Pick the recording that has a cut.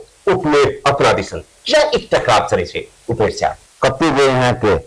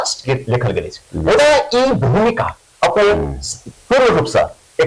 first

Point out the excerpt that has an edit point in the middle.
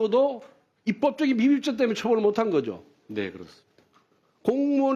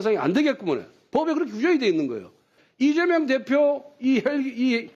second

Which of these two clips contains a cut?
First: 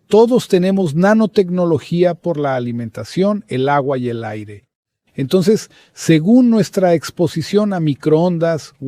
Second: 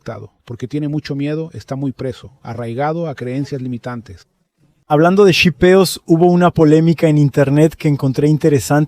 second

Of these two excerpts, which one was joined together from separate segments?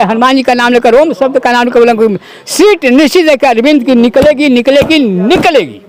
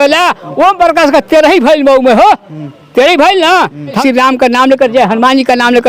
second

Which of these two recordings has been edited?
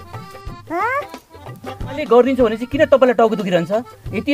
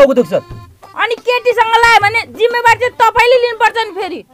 first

